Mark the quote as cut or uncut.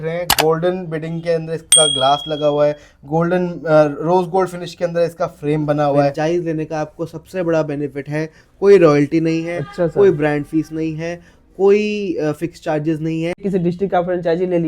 cut